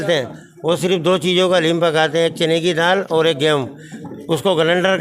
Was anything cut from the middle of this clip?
no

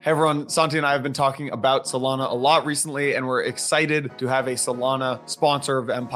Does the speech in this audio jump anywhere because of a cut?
yes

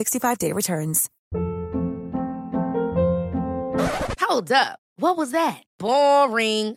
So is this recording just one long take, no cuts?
no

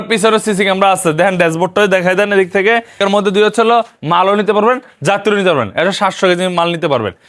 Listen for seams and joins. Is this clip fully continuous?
no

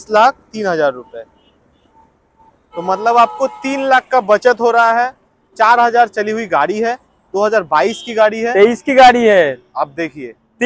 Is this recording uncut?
yes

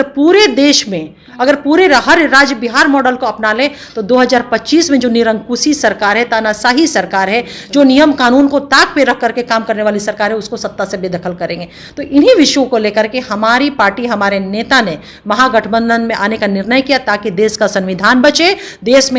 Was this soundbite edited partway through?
no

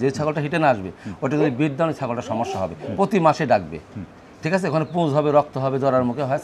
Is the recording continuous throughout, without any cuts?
yes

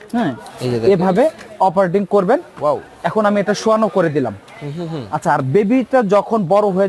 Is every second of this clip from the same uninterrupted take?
yes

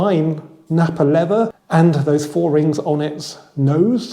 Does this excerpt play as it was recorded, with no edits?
no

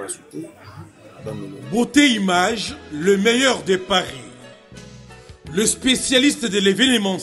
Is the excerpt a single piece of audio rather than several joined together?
no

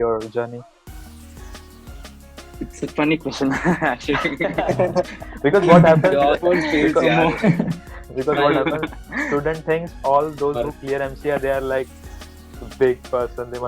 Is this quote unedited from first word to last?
yes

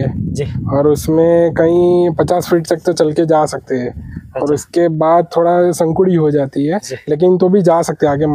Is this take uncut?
yes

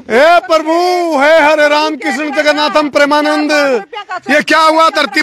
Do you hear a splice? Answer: no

